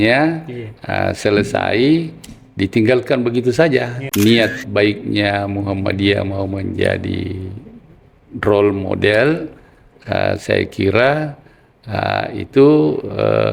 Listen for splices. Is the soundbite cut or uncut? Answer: cut